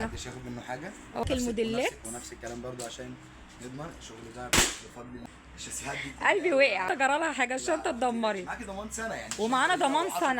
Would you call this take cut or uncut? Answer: cut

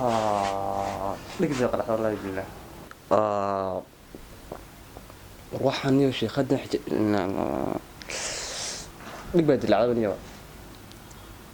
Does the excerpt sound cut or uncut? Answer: uncut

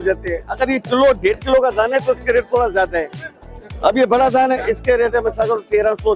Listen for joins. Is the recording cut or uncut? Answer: uncut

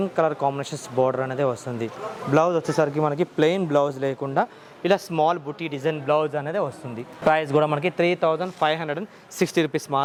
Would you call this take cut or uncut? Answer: uncut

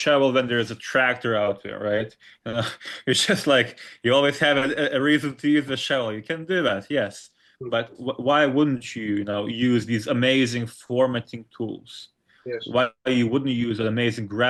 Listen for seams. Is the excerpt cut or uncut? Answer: uncut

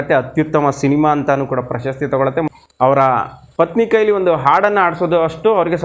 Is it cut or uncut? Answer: cut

